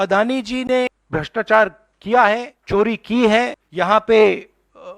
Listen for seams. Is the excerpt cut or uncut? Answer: cut